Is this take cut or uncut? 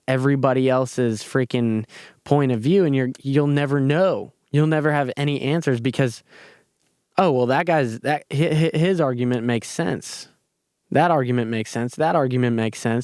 uncut